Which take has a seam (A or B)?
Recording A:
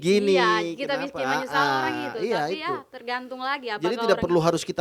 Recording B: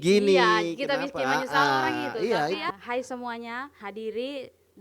B